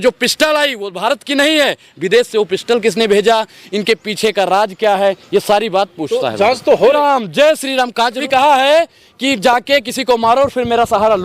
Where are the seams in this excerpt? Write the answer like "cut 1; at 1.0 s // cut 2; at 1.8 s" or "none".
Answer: cut 1; at 6.9 s // cut 2; at 8.2 s

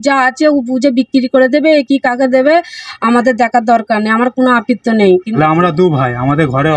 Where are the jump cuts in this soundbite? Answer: cut 1; at 5.2 s

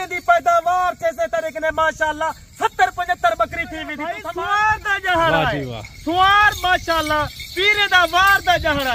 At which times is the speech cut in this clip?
cut 1; at 4.2 s

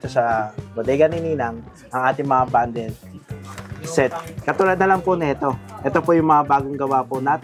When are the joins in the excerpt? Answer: none

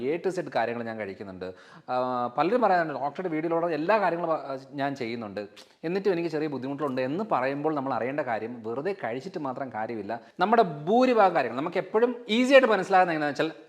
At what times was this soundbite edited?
cut 1; at 10.3 s

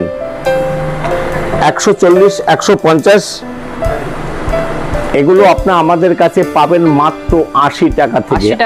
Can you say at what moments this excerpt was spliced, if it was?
none

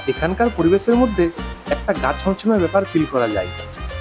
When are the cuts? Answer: none

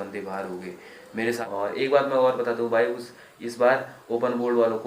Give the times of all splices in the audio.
cut 1; at 1.3 s

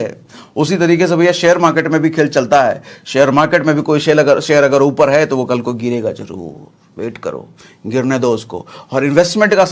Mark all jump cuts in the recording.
none

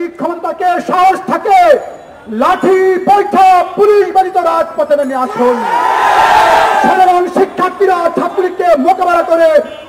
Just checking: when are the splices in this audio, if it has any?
none

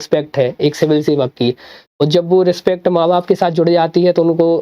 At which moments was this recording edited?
none

